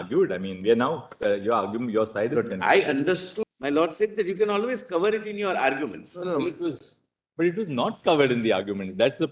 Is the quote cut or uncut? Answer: cut